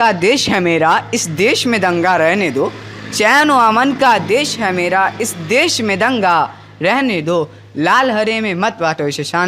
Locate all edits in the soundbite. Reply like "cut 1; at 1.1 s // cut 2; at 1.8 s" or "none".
none